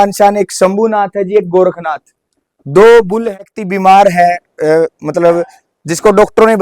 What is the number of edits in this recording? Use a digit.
1